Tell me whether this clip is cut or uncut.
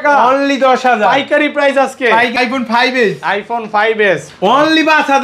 cut